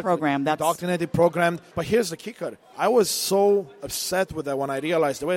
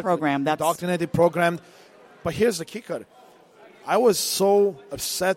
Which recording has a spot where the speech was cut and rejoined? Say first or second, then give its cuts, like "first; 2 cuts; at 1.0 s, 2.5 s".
first; 2 cuts; at 1.6 s, 2.6 s